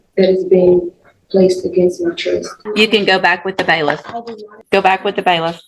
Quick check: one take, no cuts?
no; 2 cuts; at 2.6 s, 4.6 s

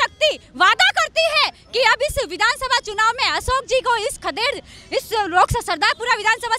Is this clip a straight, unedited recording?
yes; 0 cuts

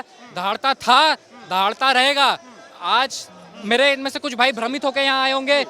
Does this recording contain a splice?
no; 0 cuts

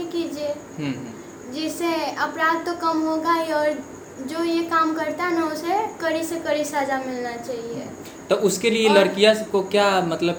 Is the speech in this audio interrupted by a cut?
no; 0 cuts

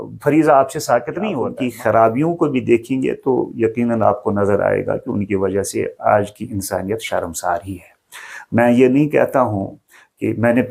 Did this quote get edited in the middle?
yes; 1 cut; at 1.5 s

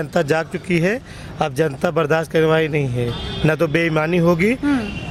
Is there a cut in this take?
no; 0 cuts

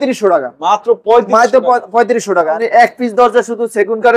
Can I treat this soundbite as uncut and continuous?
no; 1 cut; at 2.6 s

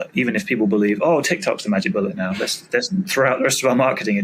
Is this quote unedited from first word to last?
yes; 0 cuts

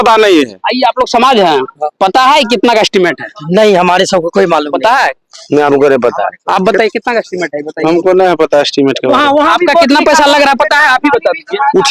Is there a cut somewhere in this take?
no; 0 cuts

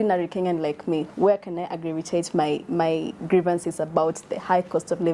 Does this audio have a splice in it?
no; 0 cuts

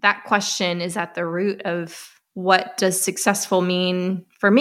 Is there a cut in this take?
no; 0 cuts

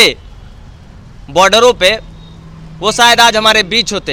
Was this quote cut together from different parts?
no; 0 cuts

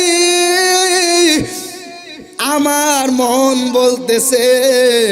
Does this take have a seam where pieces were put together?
no; 0 cuts

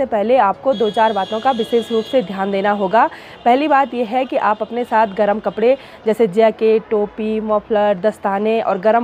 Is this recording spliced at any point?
no; 0 cuts

